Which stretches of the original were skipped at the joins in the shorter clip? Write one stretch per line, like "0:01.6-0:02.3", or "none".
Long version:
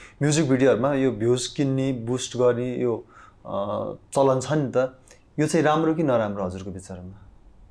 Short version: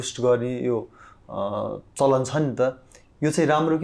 none